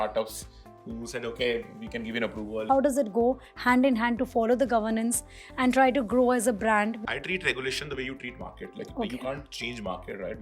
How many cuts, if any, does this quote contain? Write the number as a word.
two